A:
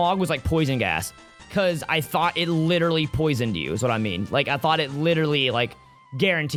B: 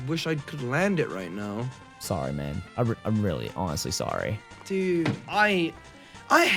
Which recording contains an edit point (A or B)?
B